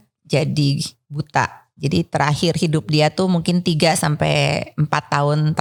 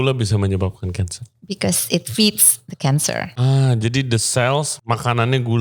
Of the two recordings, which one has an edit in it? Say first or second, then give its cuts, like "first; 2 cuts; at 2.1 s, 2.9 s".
second; 2 cuts; at 3.3 s, 4.7 s